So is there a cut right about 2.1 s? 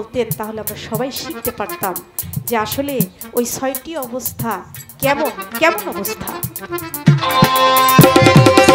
no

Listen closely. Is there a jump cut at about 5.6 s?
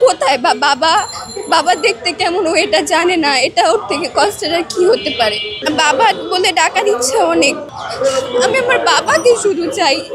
yes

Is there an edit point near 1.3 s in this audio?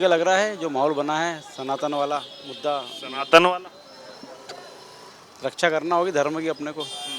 no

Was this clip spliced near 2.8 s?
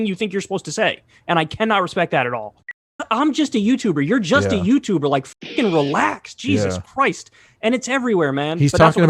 yes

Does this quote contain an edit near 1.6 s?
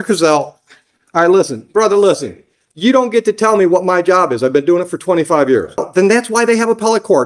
no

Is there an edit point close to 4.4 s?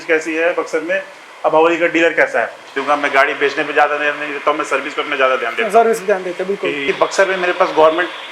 no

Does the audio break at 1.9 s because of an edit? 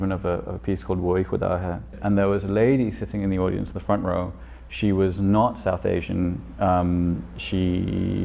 yes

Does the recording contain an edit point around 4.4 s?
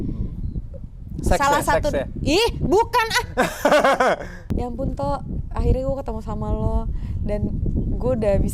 yes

